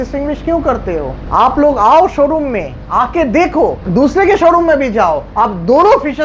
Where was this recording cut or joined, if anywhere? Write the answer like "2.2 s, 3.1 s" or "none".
1.2 s, 3.8 s, 5.3 s